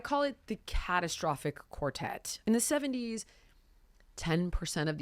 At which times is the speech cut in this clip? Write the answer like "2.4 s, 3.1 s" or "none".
2.3 s

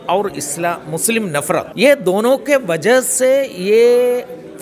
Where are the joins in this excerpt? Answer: 1.7 s

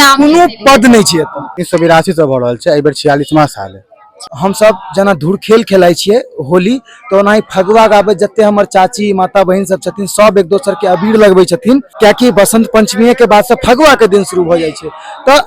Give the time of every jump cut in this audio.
1.6 s, 4.3 s, 11.9 s

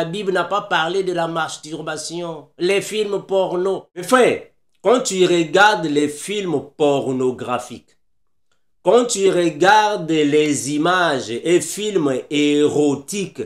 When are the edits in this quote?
4.1 s

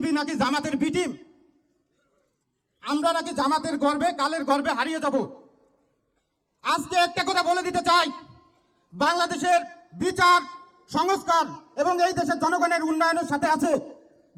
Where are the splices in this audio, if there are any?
none

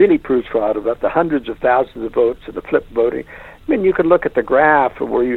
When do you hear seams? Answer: none

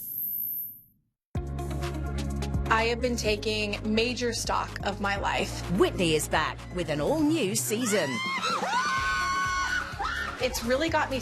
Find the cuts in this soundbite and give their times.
1.2 s

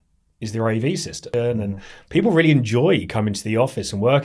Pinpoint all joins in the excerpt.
1.2 s

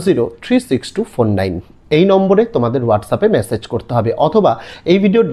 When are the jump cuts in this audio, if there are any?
1.7 s

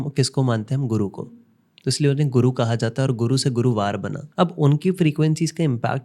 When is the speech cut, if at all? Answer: 4.2 s

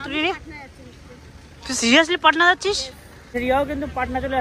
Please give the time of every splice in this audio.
3.3 s

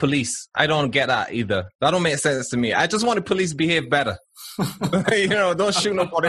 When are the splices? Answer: 1.7 s

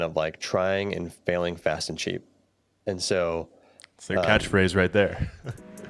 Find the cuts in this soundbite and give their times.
none

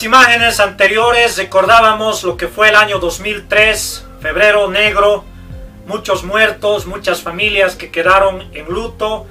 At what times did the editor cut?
none

